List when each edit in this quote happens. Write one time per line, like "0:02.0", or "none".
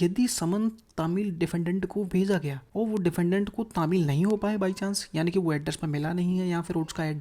0:02.6